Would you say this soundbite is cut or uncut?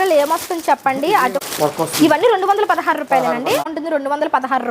cut